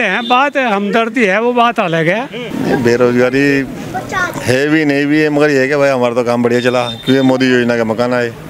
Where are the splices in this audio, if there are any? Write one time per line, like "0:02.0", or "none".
0:02.4